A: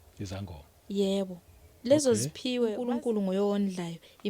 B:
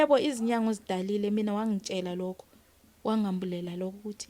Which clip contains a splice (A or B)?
A